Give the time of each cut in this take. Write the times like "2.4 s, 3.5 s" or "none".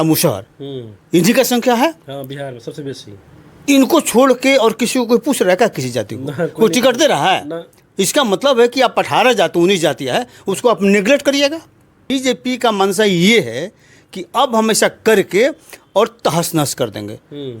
12.1 s